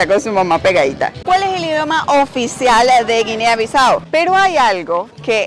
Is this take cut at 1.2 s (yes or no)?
yes